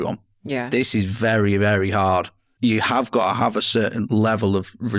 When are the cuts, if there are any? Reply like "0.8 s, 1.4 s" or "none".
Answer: 2.4 s, 4.1 s